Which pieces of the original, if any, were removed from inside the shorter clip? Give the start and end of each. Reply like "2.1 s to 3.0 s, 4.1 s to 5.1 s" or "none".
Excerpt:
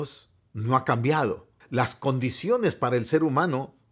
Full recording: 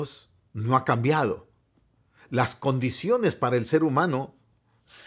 1.5 s to 2.1 s